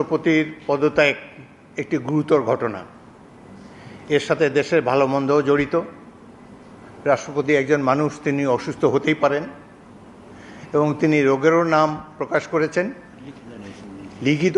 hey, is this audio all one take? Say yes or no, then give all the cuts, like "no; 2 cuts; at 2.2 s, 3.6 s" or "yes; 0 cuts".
yes; 0 cuts